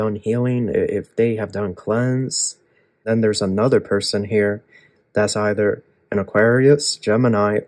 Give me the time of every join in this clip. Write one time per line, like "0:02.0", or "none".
0:03.0